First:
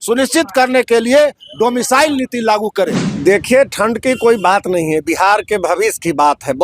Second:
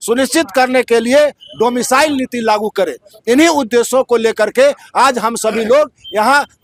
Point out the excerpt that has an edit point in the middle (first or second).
first